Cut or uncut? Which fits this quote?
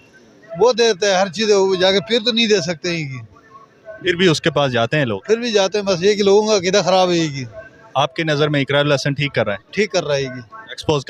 uncut